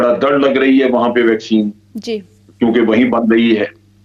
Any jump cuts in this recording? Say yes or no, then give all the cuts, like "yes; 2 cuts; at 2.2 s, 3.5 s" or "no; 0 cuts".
no; 0 cuts